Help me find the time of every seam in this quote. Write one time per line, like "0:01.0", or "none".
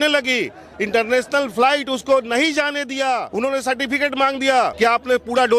0:03.3
0:04.7

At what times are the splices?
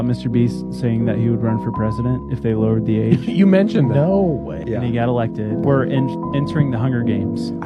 none

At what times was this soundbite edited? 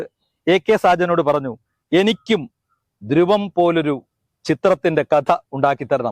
none

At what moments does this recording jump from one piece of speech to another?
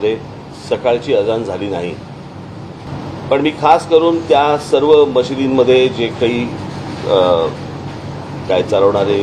0:02.9

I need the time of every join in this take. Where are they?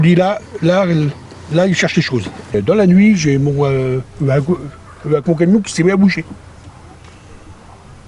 0:02.5

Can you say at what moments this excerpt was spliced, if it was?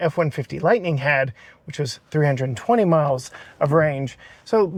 none

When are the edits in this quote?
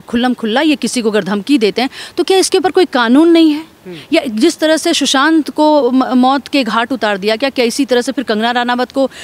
none

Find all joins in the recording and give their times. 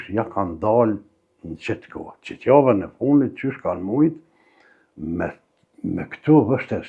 none

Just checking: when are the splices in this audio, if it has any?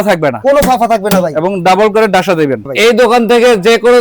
0:02.7

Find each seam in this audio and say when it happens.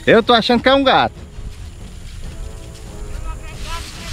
none

